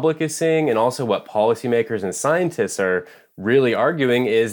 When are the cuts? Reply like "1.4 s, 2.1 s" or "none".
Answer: none